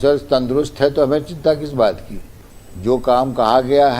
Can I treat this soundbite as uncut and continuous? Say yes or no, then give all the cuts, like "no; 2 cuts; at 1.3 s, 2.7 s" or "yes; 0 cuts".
no; 1 cut; at 2.4 s